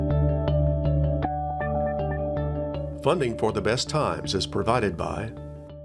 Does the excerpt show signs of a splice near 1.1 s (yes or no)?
yes